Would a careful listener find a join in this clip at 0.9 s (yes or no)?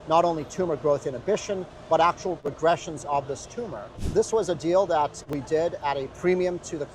no